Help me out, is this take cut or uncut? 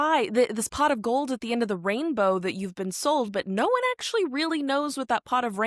uncut